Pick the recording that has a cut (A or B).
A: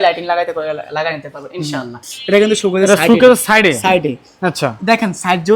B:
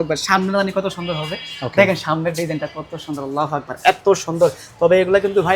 A